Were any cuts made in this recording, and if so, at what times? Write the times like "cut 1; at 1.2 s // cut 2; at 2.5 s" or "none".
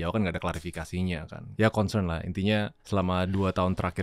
cut 1; at 1.4 s // cut 2; at 2.8 s

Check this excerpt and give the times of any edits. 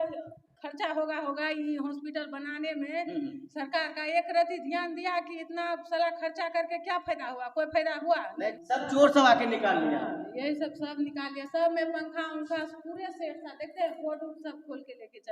cut 1; at 8.6 s

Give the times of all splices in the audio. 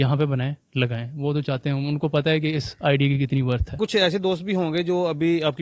cut 1; at 3.8 s

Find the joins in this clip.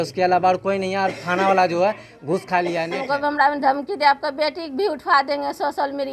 cut 1; at 3.0 s

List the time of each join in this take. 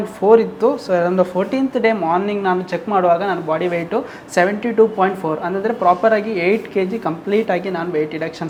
none

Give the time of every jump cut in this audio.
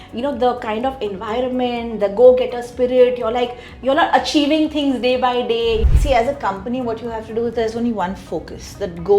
cut 1; at 5.9 s

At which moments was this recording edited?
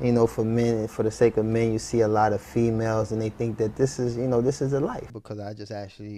cut 1; at 5.1 s

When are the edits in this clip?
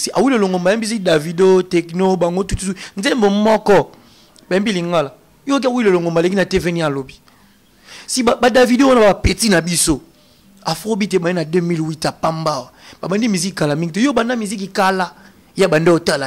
none

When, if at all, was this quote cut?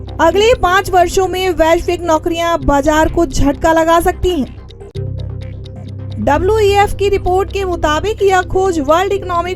none

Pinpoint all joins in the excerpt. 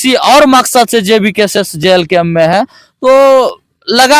none

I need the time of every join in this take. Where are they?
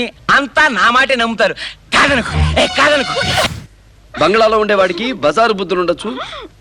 cut 1; at 3.6 s

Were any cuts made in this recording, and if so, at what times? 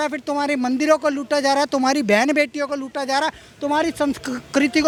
none

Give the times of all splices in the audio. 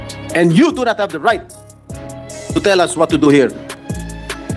cut 1; at 3.7 s

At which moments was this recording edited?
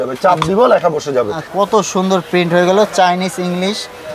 cut 1; at 1.5 s

